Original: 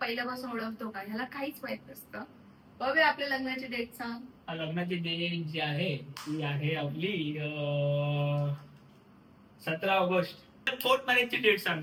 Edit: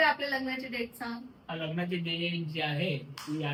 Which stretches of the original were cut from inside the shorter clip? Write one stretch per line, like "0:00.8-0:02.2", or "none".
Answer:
none

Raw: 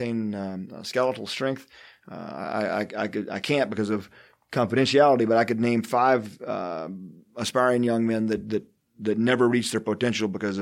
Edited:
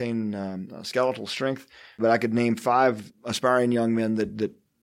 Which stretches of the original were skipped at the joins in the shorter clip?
0:02.0-0:05.3
0:06.4-0:07.2

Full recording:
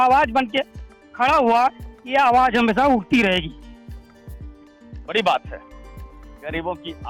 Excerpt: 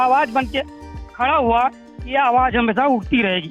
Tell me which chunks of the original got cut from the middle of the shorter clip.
none

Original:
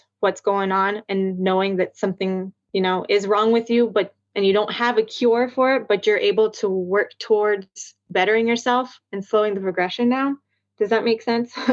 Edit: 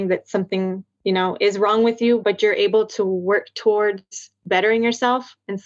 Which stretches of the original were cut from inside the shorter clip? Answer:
0:03.9-0:05.9

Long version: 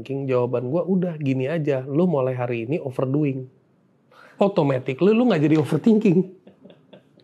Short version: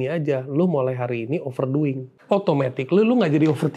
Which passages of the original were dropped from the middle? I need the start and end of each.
0:03.5-0:04.2

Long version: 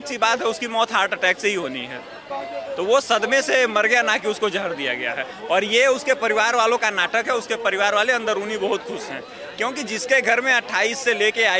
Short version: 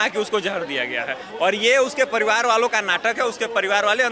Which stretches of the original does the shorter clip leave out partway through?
none

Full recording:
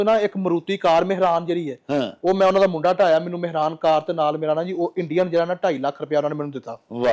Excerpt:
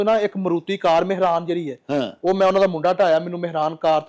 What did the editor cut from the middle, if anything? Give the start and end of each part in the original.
none

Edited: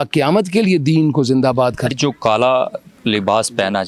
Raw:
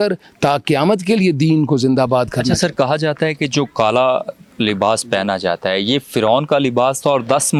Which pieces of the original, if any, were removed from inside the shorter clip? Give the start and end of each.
0:02.4-0:03.4

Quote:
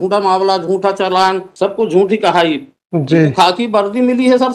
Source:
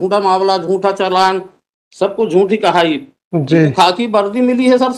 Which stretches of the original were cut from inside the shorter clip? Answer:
0:01.5-0:01.9

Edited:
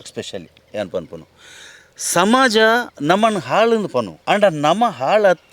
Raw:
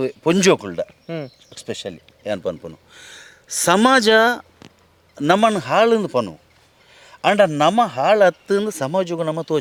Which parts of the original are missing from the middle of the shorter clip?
0:04.4-0:05.1
0:06.3-0:07.1

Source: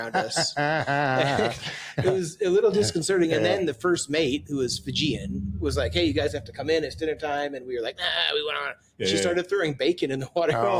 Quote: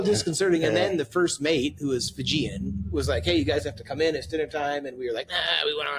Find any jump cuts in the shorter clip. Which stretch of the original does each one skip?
none

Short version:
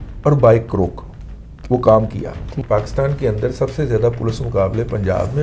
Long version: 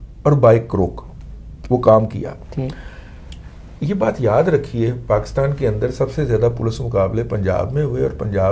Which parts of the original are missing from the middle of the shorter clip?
0:02.6-0:05.0

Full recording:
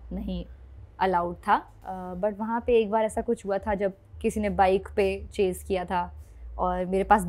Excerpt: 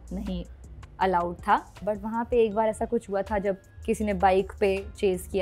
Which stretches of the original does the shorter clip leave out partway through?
0:01.7-0:02.1

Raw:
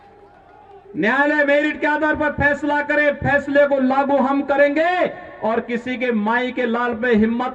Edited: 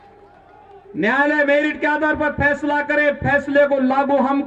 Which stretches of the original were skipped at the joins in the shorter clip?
none

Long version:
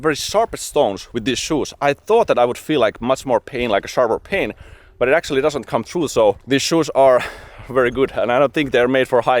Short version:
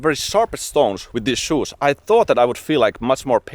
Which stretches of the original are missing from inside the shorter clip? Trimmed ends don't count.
none

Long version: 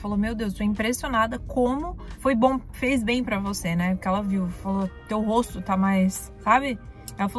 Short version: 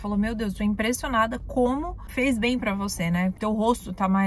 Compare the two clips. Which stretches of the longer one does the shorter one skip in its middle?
0:02.1-0:02.7
0:04.0-0:05.0

